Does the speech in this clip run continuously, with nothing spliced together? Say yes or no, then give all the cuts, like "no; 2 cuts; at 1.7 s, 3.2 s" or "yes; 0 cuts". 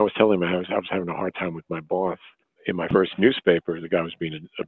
yes; 0 cuts